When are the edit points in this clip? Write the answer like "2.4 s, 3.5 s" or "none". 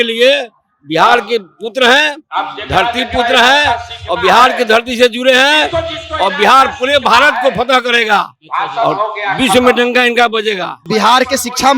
10.9 s